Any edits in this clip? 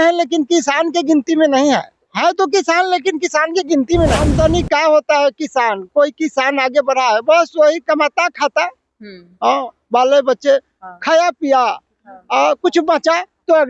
yes; 1 cut; at 4.3 s

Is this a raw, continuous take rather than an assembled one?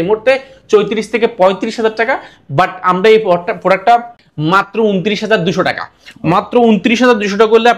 yes; 0 cuts

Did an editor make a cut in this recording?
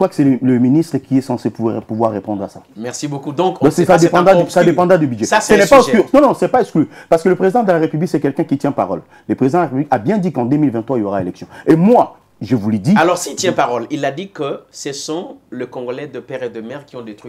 no; 0 cuts

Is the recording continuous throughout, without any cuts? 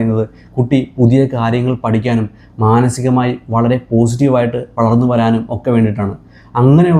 yes; 0 cuts

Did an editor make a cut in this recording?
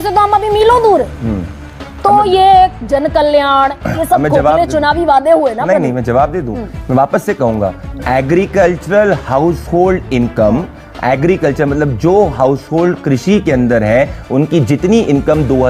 no; 0 cuts

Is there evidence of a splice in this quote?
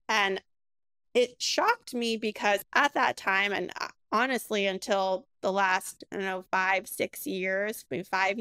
yes; 1 cut; at 2.6 s

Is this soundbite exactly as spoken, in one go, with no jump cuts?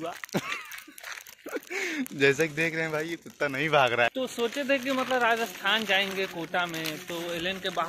no; 1 cut; at 4.1 s

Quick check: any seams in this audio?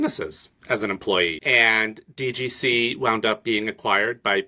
yes; 1 cut; at 1.4 s

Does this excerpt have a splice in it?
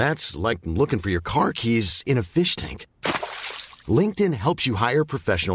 no; 0 cuts

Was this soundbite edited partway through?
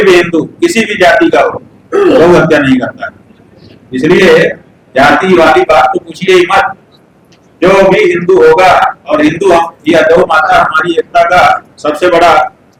no; 0 cuts

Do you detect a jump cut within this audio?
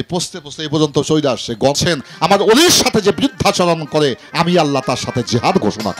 yes; 1 cut; at 1.8 s

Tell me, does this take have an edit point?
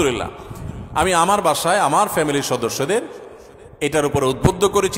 no; 0 cuts

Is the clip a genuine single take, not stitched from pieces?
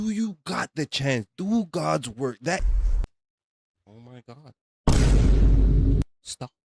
no; 1 cut; at 2.6 s

